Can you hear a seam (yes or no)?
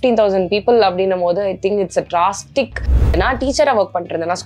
yes